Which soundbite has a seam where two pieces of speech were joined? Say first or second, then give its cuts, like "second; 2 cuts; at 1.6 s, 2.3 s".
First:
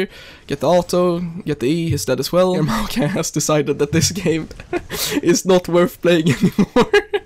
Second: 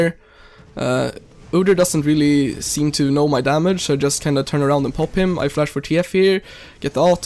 first; 1 cut; at 2.6 s